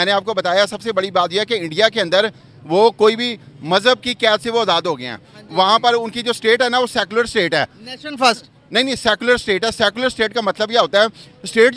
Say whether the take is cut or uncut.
uncut